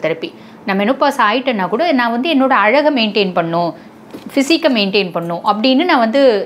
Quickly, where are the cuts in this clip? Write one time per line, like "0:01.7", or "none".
none